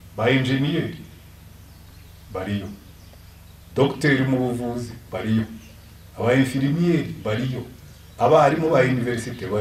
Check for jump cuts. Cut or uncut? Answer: uncut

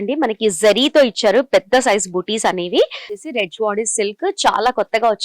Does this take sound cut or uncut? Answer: cut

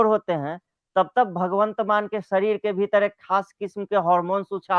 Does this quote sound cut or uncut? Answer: uncut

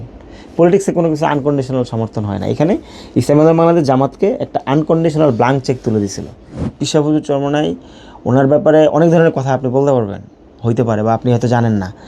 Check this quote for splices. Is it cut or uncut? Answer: cut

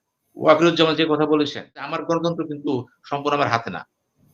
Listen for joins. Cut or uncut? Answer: cut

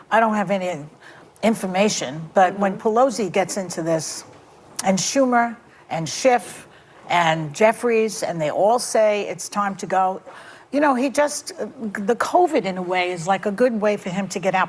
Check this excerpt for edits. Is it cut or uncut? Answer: uncut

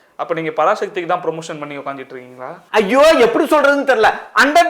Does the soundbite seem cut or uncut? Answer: cut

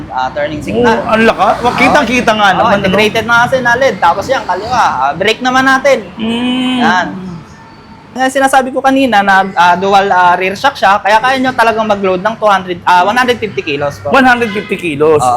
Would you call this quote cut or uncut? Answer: cut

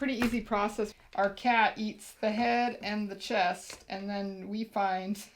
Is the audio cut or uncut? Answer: cut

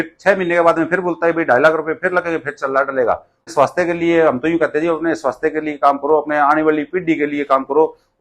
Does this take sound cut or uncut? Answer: cut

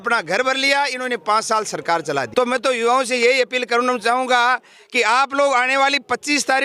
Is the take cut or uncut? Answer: cut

